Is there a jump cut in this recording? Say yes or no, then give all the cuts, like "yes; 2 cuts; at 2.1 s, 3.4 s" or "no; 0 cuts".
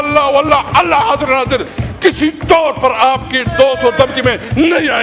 no; 0 cuts